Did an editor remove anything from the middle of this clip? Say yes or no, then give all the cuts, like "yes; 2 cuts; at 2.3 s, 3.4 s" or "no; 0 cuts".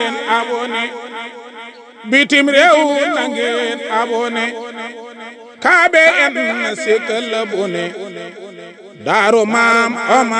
no; 0 cuts